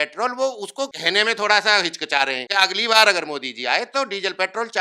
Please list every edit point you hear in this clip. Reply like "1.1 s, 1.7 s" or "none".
1.0 s, 2.4 s